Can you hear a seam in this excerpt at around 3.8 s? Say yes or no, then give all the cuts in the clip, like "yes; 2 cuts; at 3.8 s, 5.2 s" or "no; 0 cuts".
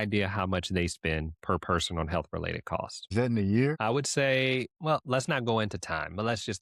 yes; 2 cuts; at 3.0 s, 3.8 s